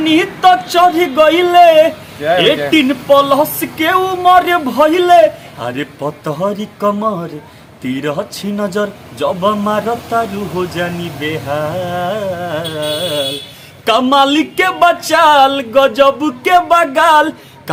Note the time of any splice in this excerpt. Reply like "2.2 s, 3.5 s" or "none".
none